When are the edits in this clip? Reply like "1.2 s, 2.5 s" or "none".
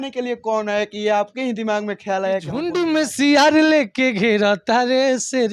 2.7 s